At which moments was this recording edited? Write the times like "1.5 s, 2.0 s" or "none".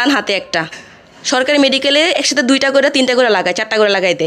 none